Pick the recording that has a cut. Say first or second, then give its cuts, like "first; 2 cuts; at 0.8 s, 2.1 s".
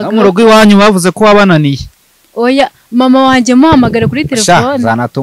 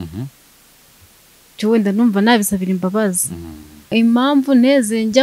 second; 1 cut; at 3.9 s